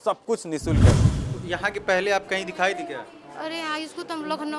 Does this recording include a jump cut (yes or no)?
yes